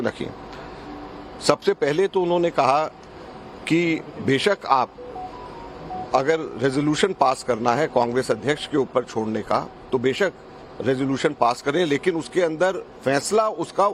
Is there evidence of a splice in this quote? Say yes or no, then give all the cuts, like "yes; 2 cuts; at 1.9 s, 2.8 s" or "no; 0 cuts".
no; 0 cuts